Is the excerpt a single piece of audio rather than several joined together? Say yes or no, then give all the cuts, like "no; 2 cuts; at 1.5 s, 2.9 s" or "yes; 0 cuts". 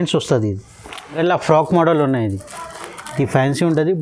no; 1 cut; at 1.2 s